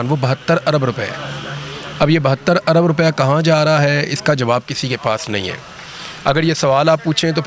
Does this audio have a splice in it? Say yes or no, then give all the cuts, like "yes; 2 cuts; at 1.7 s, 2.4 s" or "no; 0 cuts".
no; 0 cuts